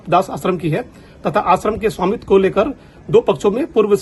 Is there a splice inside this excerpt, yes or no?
no